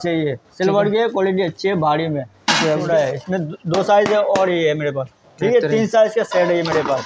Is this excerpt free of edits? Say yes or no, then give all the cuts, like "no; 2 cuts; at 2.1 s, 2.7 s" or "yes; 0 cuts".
no; 1 cut; at 2.9 s